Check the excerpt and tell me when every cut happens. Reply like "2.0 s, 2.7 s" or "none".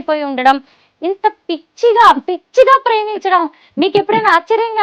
none